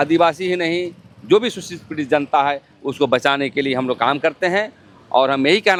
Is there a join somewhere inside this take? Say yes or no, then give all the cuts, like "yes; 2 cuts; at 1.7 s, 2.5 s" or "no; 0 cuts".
no; 0 cuts